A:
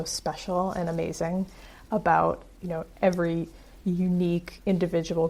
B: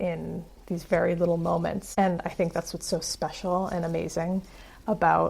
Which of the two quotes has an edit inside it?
B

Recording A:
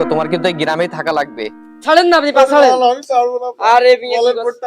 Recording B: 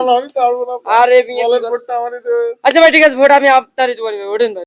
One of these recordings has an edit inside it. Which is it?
A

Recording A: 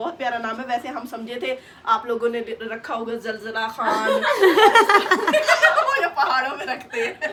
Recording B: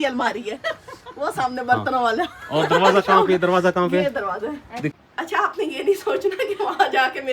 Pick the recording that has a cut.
B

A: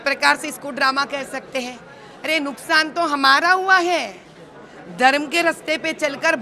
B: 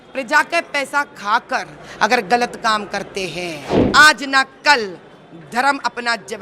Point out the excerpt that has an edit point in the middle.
B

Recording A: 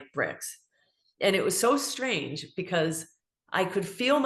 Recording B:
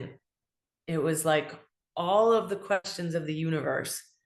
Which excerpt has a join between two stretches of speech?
B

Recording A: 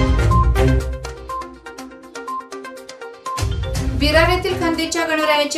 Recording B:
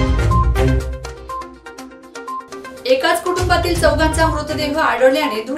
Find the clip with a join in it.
B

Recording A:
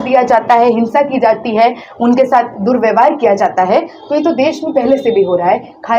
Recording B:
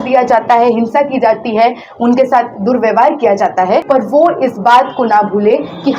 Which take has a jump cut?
B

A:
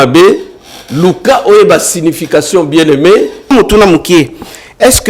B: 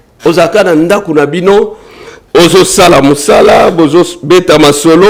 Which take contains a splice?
A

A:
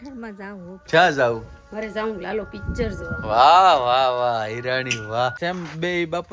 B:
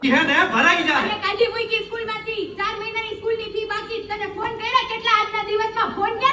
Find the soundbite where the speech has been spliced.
A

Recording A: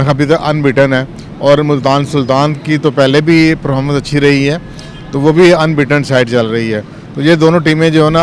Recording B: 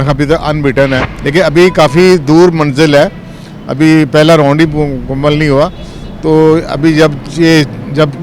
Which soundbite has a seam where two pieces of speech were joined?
B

